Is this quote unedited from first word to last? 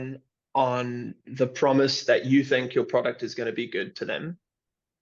yes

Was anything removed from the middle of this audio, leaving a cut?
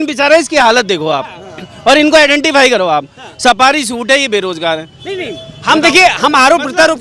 no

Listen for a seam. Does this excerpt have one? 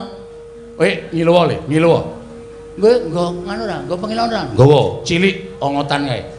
no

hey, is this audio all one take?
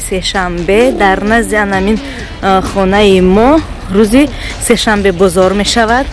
yes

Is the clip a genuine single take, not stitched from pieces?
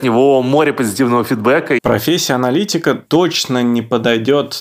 no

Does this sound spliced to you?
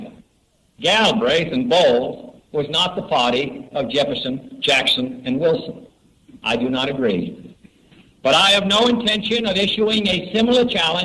yes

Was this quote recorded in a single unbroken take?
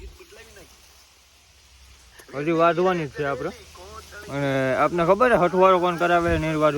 yes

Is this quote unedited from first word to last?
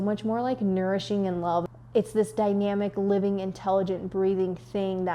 no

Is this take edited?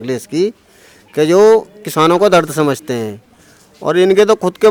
no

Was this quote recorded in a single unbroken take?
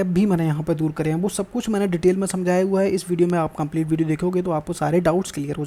yes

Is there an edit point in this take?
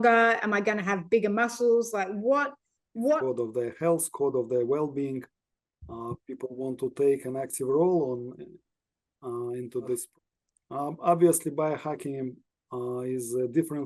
yes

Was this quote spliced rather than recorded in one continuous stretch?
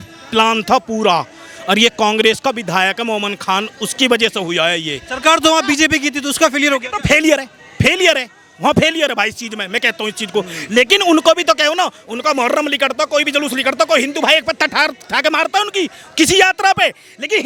no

